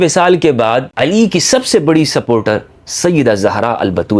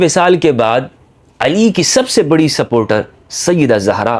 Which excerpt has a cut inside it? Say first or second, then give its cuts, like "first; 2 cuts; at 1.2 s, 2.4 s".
first; 1 cut; at 0.9 s